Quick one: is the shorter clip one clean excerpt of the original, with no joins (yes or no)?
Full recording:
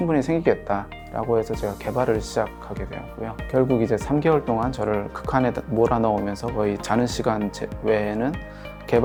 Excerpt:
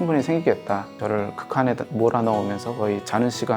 no